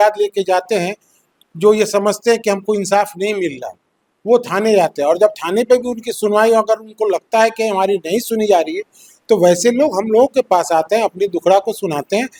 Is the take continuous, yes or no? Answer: yes